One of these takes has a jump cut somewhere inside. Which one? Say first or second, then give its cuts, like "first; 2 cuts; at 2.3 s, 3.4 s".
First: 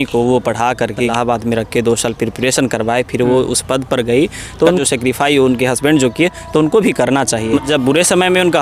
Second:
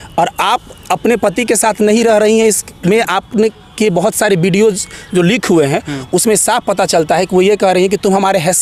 first; 3 cuts; at 1.1 s, 4.8 s, 7.6 s